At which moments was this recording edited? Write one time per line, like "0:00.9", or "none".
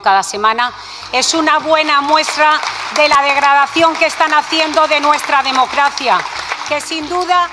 none